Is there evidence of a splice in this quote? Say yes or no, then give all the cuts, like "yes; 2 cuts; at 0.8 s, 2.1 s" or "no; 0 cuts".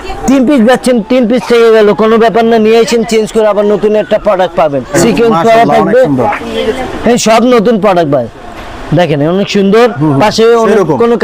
yes; 1 cut; at 5.0 s